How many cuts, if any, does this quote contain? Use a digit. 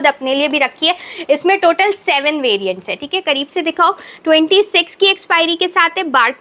0